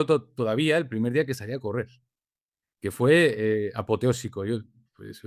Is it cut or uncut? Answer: uncut